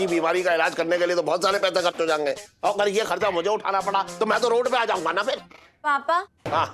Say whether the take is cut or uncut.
cut